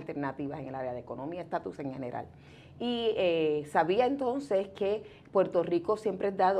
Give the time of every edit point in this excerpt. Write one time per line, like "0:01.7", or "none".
none